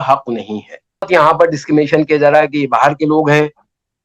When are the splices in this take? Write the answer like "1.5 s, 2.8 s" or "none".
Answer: 1.1 s